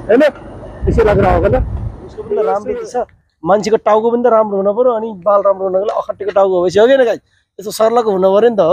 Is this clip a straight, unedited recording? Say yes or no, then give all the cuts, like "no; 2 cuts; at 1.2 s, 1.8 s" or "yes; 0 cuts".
no; 1 cut; at 2.6 s